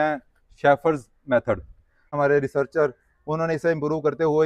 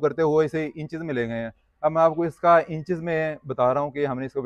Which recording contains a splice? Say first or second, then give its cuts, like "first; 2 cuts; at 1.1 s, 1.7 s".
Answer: first; 1 cut; at 2.1 s